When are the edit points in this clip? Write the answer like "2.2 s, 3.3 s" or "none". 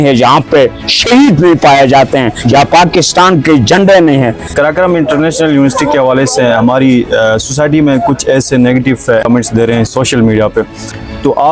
4.5 s, 9.2 s